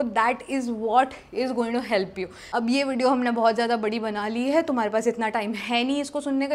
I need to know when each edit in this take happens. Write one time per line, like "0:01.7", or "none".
0:02.3